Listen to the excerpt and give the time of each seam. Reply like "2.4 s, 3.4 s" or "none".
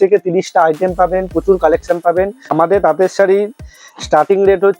2.5 s